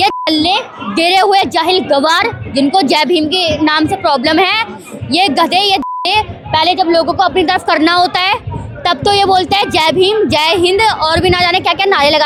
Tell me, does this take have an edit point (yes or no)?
no